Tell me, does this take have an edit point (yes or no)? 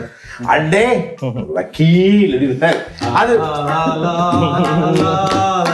no